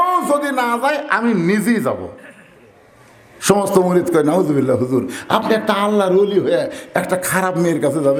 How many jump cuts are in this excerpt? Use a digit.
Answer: 0